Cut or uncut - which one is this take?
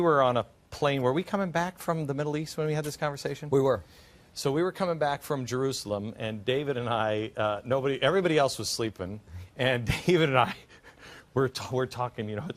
cut